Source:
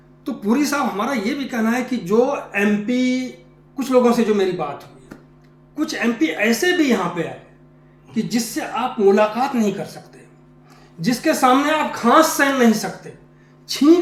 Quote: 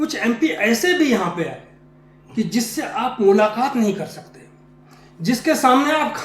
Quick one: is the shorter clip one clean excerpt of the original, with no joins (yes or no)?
yes